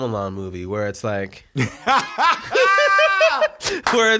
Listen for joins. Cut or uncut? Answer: uncut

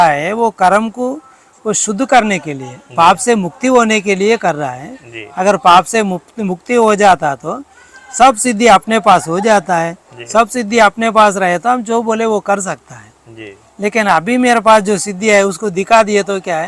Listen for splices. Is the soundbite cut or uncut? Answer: uncut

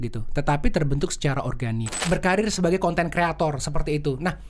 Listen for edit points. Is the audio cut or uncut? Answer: cut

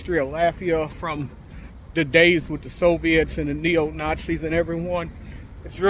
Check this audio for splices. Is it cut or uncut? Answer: uncut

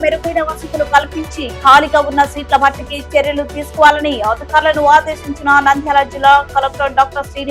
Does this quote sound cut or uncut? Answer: uncut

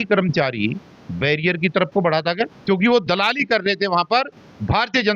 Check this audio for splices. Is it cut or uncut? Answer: cut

